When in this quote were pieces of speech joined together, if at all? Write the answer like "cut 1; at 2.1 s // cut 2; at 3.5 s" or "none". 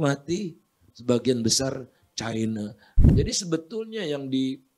cut 1; at 2.9 s